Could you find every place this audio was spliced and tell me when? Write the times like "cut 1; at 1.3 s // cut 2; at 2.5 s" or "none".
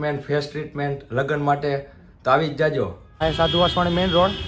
cut 1; at 3.2 s